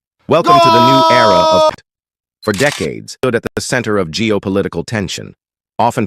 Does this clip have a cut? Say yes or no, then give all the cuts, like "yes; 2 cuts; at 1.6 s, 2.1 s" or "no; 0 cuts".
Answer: yes; 2 cuts; at 1.8 s, 3.4 s